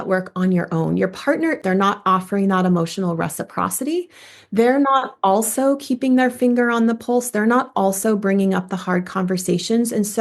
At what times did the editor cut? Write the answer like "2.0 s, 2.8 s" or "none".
1.5 s